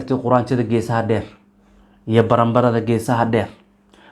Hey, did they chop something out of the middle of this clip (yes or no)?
no